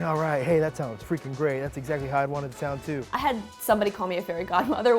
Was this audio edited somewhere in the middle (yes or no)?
yes